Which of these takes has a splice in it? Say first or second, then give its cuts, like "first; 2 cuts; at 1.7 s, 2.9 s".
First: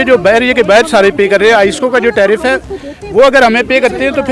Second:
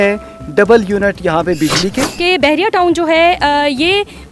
second; 1 cut; at 2.1 s